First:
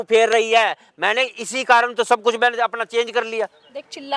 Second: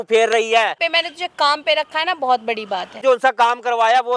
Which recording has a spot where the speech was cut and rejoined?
second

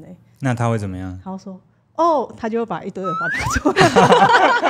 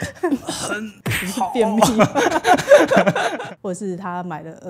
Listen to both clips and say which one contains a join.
second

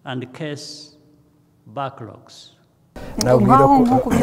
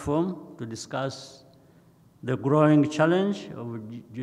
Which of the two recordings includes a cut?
first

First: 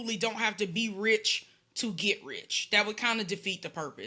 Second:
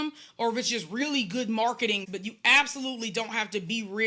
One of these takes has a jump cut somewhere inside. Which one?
second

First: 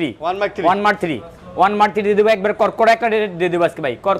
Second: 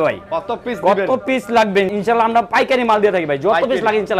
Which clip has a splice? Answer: second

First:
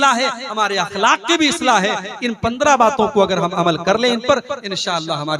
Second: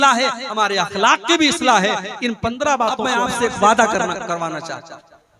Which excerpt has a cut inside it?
second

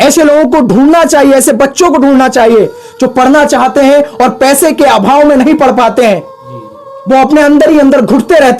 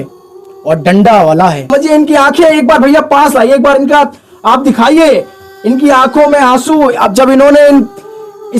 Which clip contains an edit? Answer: second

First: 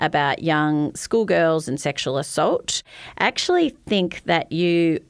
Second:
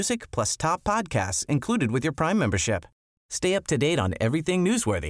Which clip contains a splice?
first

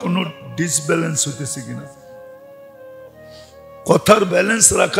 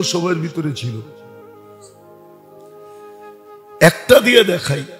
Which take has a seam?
second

